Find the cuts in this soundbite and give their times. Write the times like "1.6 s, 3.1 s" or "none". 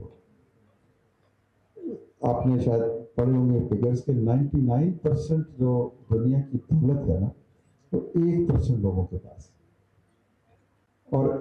none